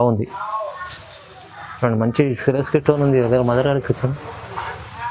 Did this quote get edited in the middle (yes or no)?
no